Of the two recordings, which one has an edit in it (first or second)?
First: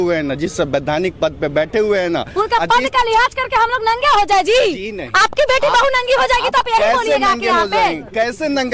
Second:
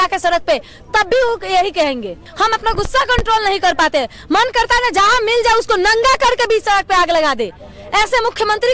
second